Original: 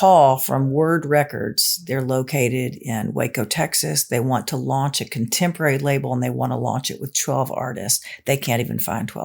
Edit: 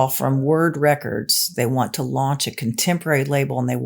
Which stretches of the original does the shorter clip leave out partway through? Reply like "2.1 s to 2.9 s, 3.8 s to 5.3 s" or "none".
1.7 s to 4.0 s